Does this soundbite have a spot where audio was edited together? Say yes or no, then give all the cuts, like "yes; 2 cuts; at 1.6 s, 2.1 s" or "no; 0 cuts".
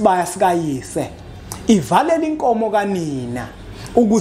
no; 0 cuts